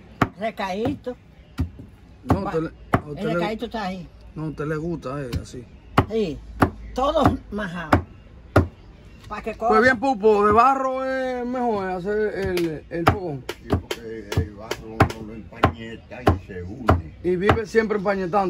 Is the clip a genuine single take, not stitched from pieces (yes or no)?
yes